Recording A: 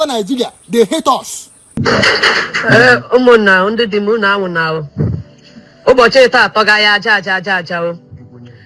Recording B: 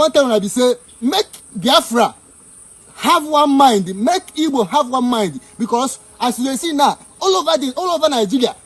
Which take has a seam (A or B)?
A